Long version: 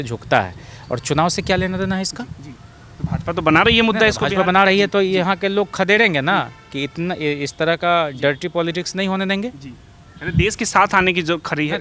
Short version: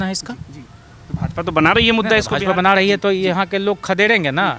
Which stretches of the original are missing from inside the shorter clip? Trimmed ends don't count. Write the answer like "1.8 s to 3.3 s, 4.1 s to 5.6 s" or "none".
none